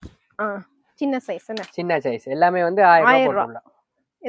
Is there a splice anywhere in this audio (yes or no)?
no